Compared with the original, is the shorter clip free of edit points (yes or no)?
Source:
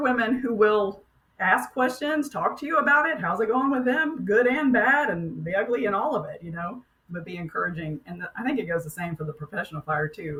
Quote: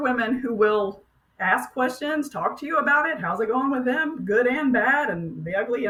yes